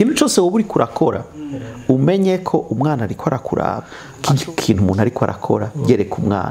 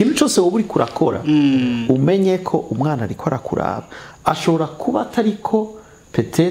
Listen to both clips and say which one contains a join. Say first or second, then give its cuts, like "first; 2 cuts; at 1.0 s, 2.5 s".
first; 1 cut; at 4.2 s